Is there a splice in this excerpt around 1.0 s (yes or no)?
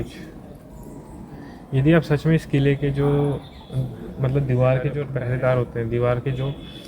no